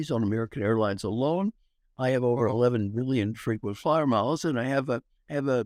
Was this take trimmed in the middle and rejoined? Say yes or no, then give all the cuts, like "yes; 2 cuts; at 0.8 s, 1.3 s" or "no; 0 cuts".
no; 0 cuts